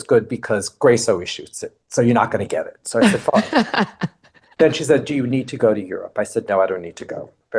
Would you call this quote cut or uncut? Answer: uncut